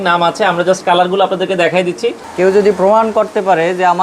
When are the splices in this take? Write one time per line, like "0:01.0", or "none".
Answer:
0:02.2